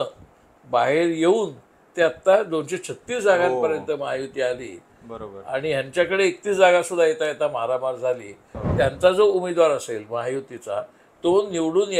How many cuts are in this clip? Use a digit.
1